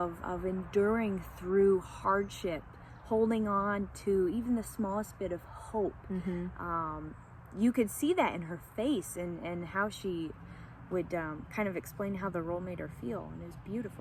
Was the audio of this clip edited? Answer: no; 0 cuts

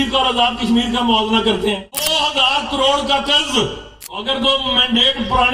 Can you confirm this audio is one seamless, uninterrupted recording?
no; 2 cuts; at 2.1 s, 4.2 s

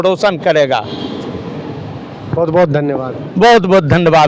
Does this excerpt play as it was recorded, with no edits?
yes; 0 cuts

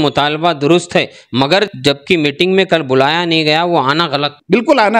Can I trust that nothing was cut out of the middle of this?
no; 1 cut; at 1.7 s

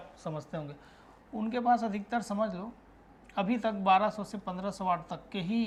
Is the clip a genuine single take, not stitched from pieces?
yes; 0 cuts

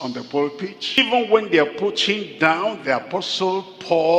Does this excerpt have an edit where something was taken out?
yes; 1 cut; at 1.0 s

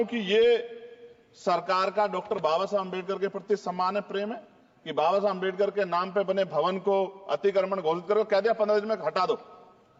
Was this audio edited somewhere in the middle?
no; 0 cuts

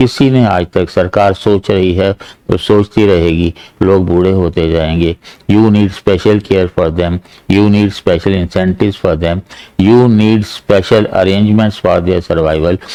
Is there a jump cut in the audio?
no; 0 cuts

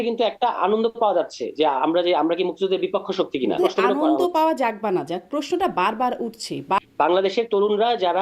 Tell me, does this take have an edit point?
yes; 2 cuts; at 3.6 s, 6.8 s

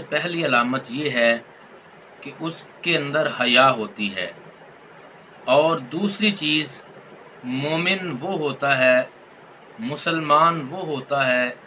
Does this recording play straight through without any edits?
yes; 0 cuts

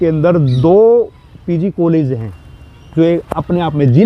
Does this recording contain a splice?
no; 0 cuts

